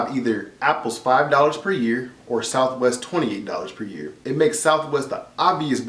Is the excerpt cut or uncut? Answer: cut